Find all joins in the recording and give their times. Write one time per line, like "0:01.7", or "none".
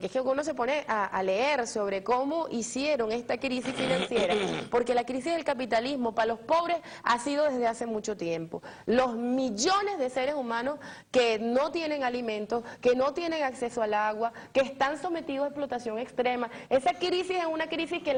none